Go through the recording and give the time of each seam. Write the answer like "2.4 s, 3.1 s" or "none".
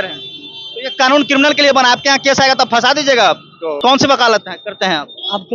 3.8 s